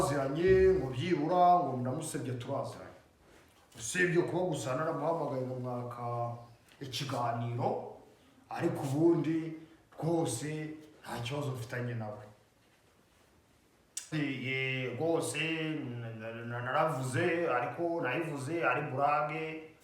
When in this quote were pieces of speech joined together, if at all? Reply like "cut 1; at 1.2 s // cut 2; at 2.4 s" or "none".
cut 1; at 14.1 s